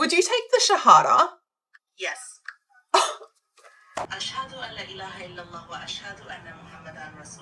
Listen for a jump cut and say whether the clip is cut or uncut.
uncut